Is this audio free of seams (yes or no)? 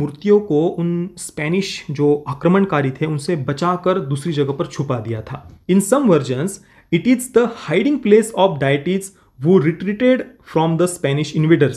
no